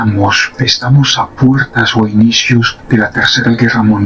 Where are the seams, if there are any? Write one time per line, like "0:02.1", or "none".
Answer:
none

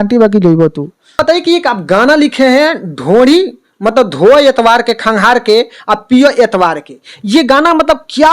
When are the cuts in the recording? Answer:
0:01.2

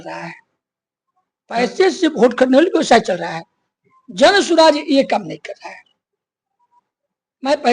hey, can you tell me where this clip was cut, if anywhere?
none

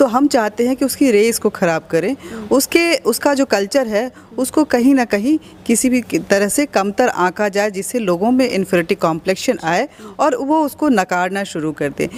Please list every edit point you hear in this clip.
none

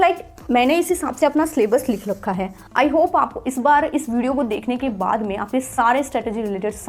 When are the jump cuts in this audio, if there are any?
0:02.6

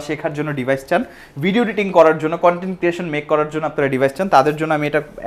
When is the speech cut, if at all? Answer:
none

